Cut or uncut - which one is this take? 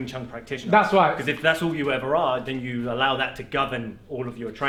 uncut